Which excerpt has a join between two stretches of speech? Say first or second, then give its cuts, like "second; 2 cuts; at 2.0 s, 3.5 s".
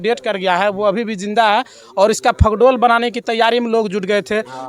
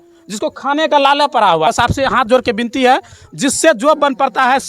second; 1 cut; at 1.7 s